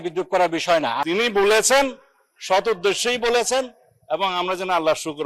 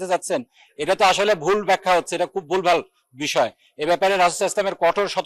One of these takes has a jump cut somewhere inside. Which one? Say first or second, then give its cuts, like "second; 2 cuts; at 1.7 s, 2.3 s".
first; 1 cut; at 1.0 s